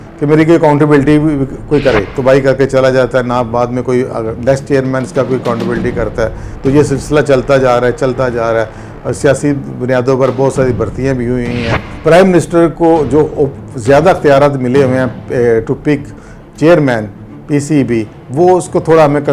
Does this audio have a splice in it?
yes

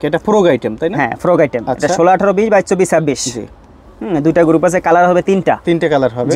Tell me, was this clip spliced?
no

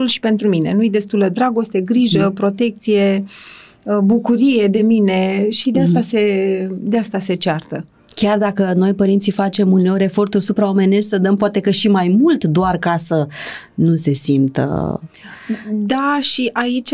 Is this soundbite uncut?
yes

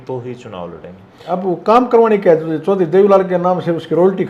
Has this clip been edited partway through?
yes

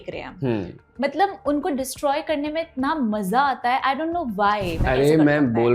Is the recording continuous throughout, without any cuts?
no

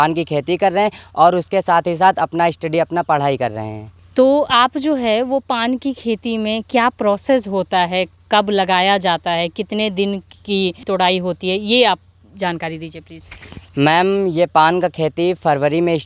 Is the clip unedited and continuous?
yes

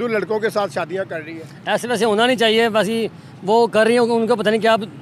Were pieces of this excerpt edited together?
no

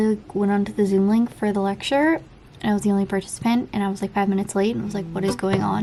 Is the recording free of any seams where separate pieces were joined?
yes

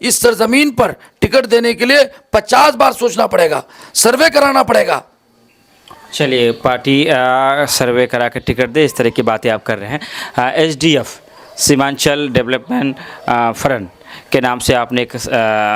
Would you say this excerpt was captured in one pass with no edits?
yes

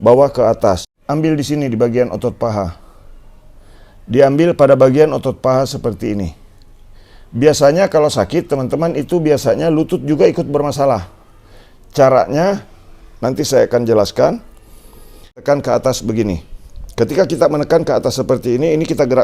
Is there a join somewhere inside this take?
yes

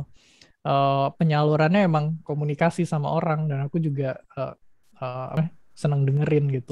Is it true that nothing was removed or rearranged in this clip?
no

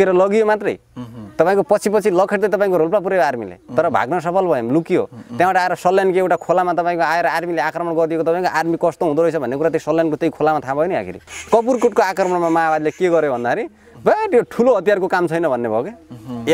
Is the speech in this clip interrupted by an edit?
yes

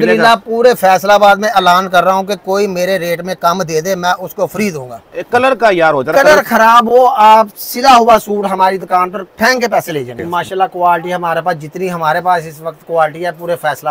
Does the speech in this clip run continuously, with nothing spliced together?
no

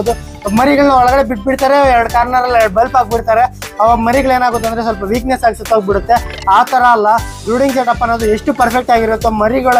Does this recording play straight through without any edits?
yes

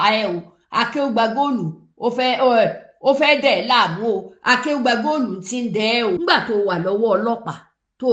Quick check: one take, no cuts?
no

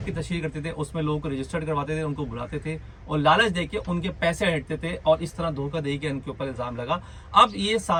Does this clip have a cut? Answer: no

